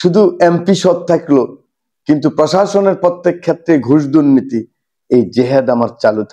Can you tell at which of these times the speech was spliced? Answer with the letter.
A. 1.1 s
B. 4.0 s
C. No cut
C